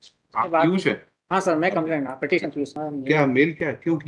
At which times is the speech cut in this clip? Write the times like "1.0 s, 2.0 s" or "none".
2.8 s